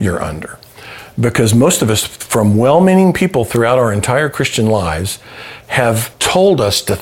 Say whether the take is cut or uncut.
cut